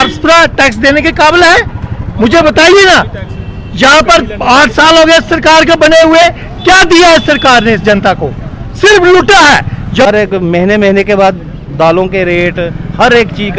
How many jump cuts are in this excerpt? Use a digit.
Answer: 1